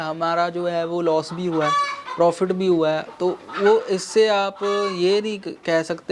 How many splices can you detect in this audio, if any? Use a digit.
0